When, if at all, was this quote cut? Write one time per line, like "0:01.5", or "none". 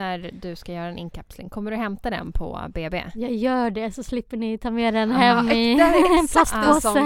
none